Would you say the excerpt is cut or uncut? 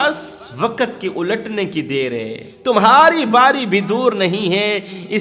cut